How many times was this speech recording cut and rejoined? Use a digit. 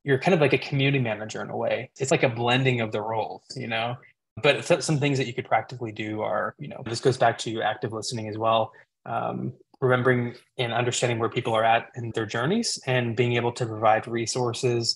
4